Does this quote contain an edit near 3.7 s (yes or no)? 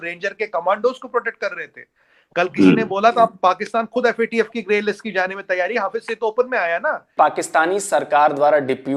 no